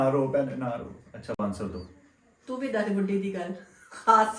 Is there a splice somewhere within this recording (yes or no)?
no